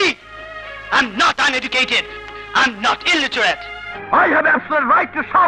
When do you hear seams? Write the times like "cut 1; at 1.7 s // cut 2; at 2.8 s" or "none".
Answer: cut 1; at 3.9 s